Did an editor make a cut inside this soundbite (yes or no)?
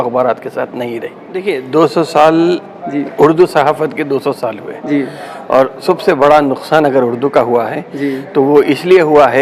yes